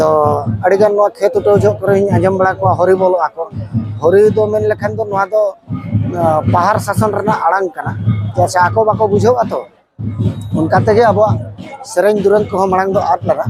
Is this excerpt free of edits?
yes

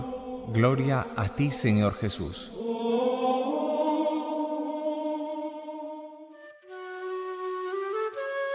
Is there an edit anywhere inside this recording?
no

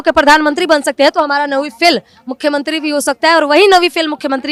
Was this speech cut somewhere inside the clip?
no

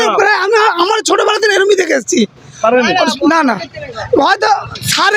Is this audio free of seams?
yes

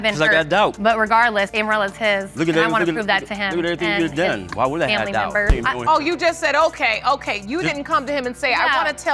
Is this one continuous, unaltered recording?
no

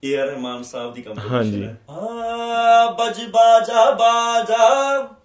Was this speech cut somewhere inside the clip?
yes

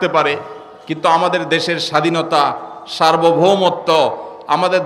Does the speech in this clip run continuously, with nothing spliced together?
yes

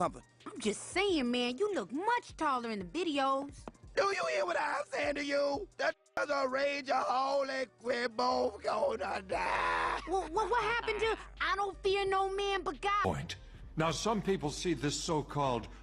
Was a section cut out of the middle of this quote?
yes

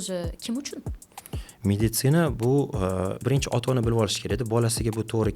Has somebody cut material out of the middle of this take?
yes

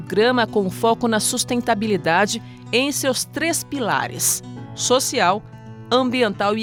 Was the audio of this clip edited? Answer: no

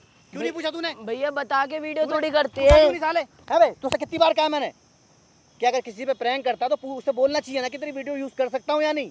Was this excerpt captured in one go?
yes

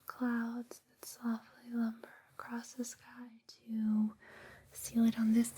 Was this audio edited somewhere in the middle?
yes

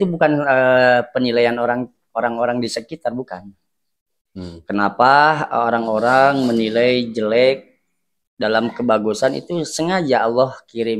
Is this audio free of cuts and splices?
yes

